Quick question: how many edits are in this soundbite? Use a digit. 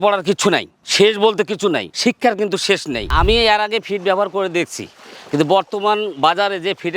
1